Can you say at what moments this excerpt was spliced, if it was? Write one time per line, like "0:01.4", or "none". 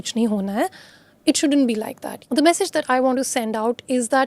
0:02.2